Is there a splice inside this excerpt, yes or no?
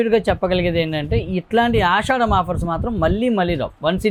no